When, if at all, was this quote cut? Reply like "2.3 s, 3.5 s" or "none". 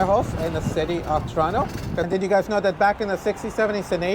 2.1 s